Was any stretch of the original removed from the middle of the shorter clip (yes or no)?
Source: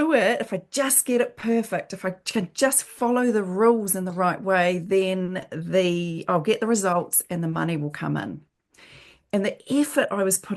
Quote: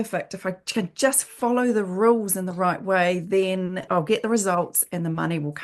yes